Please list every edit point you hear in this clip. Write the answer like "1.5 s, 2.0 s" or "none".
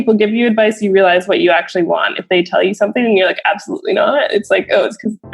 none